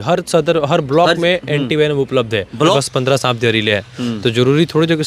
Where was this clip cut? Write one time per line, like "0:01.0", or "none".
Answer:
0:02.7